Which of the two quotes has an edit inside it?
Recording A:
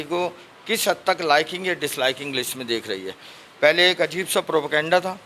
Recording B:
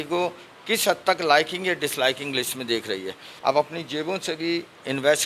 B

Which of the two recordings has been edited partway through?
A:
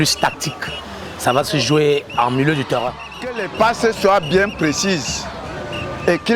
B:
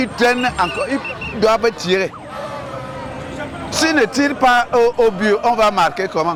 A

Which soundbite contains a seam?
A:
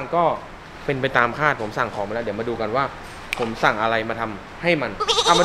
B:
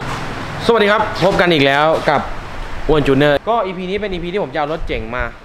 B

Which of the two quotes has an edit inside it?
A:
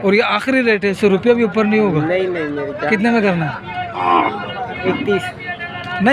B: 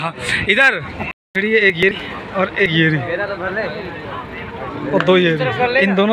B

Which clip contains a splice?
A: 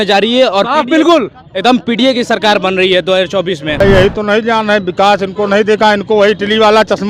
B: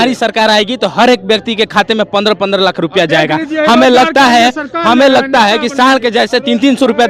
A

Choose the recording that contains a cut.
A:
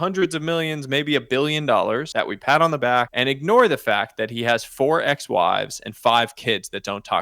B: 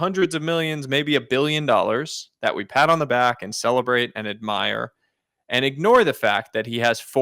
A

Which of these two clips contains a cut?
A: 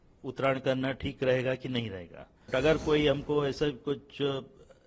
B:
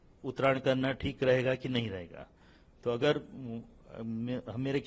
A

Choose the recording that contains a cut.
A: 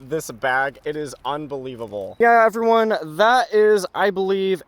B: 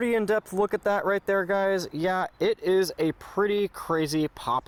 A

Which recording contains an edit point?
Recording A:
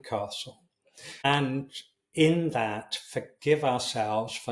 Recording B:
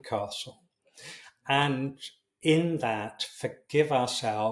A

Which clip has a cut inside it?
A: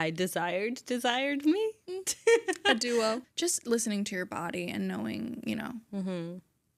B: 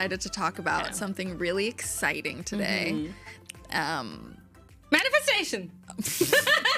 A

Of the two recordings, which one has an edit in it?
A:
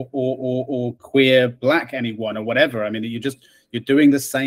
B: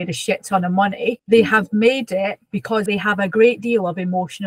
B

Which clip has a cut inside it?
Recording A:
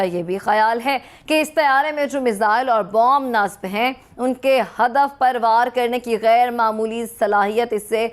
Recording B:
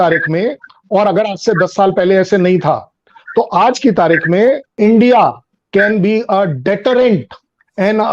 B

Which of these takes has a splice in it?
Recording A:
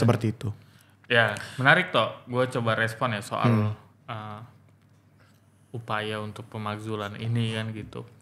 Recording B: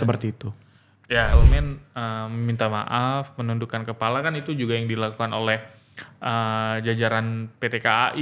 B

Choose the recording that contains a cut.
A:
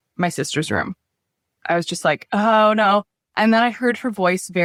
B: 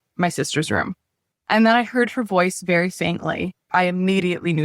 B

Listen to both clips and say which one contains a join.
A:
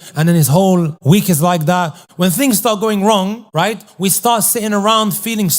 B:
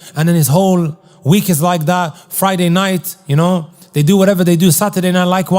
A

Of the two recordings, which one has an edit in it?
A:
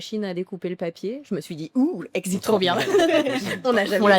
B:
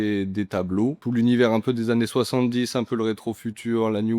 B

